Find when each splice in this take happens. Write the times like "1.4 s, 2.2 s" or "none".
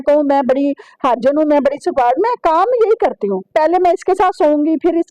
3.5 s